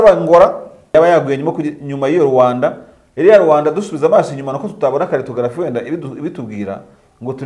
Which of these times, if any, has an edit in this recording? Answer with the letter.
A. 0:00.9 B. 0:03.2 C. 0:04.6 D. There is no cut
A